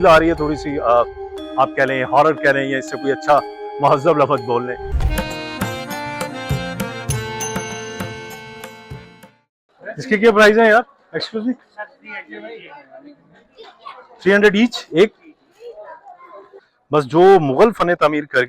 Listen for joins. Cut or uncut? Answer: cut